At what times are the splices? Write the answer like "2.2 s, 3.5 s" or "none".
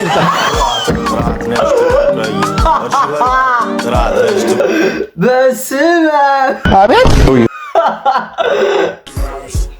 4.6 s, 9.0 s